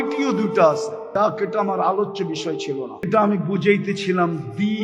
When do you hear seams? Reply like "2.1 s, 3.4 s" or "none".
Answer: 0.9 s, 3.1 s